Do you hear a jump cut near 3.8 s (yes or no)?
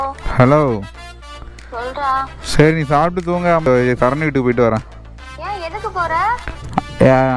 yes